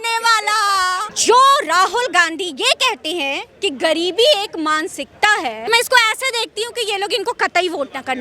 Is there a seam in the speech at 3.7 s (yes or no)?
no